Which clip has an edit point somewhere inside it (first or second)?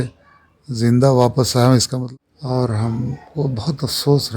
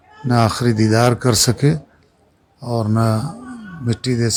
first